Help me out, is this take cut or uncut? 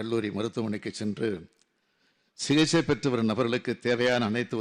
uncut